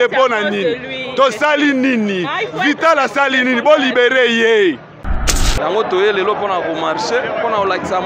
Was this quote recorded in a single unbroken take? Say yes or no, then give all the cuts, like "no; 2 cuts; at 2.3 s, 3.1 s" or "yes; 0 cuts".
no; 1 cut; at 5.2 s